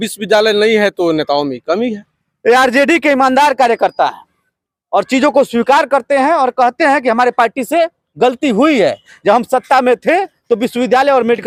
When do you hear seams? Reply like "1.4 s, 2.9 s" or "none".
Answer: none